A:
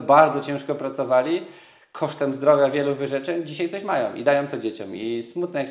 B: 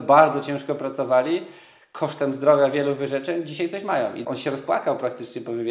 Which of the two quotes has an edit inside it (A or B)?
B